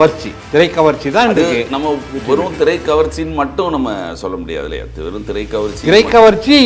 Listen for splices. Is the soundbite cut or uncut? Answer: uncut